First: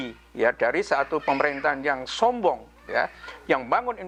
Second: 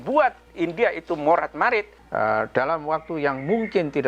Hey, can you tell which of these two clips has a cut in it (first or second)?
second